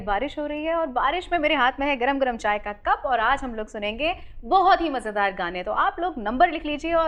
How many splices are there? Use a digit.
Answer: 0